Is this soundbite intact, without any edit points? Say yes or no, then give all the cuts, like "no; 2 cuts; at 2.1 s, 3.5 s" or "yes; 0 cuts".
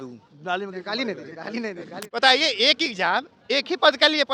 no; 1 cut; at 2.0 s